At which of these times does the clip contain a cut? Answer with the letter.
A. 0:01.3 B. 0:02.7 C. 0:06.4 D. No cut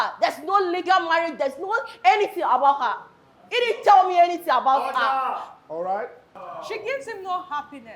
C